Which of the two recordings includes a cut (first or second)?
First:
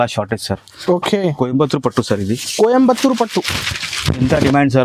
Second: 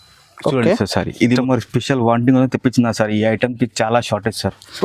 second